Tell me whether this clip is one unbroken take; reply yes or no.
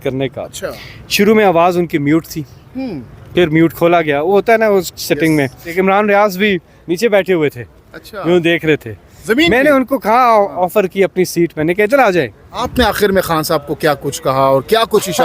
no